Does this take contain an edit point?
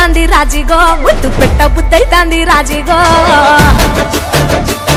no; 0 cuts

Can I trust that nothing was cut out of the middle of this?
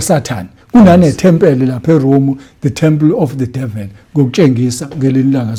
yes; 0 cuts

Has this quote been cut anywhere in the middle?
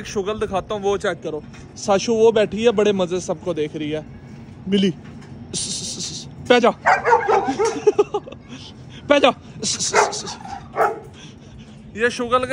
no; 0 cuts

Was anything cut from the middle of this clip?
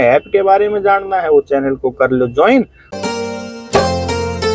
yes; 1 cut; at 2.8 s

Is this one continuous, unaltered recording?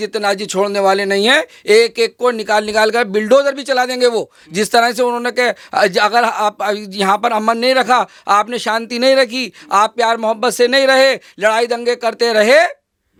yes; 0 cuts

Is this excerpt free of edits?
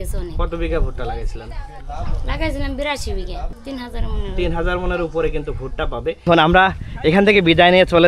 no; 2 cuts; at 3.5 s, 6.2 s

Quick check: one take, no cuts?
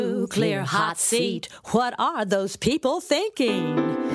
yes; 0 cuts

